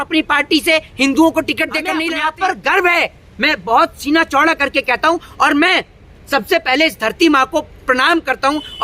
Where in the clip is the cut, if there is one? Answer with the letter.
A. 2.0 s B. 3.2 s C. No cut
A